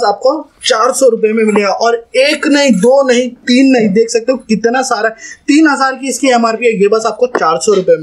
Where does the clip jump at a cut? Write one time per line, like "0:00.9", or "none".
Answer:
none